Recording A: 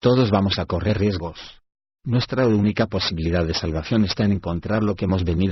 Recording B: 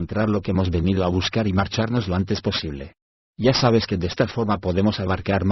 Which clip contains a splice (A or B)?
B